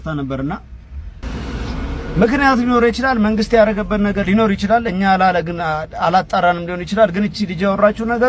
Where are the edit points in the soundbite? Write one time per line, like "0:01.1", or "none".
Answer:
0:01.2

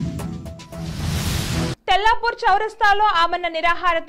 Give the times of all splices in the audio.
0:01.8

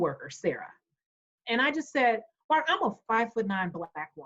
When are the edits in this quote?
0:01.3

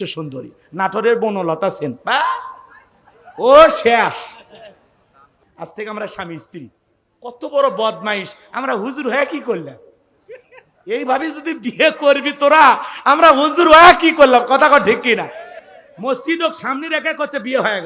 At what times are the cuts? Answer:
0:05.4

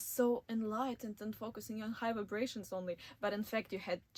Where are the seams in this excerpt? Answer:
none

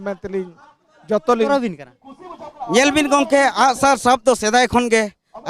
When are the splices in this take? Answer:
0:01.5

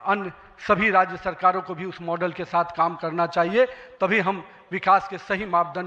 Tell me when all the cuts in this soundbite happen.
none

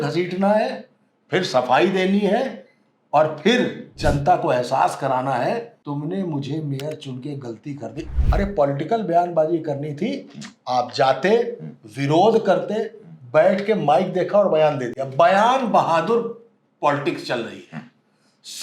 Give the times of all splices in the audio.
0:05.8
0:07.9

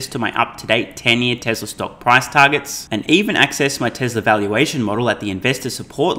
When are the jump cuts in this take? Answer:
none

